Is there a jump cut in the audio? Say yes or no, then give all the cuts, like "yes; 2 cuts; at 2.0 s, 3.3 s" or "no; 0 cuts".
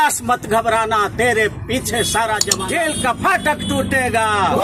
yes; 1 cut; at 2.5 s